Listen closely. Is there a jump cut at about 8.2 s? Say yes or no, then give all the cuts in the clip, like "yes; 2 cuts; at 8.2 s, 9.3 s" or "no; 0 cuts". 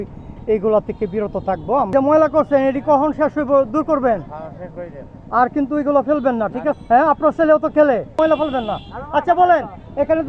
yes; 3 cuts; at 1.9 s, 6.8 s, 8.2 s